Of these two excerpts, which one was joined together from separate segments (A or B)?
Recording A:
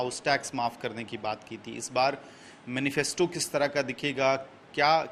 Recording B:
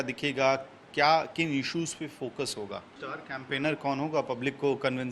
B